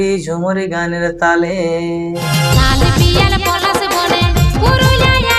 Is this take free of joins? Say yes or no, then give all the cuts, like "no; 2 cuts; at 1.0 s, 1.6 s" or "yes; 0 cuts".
no; 1 cut; at 2.2 s